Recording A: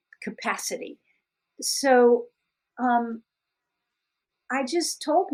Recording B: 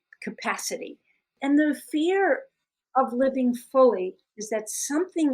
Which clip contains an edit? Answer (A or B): B